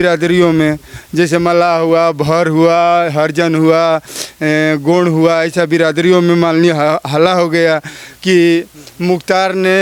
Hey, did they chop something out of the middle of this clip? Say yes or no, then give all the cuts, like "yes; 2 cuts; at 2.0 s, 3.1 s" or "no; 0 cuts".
no; 0 cuts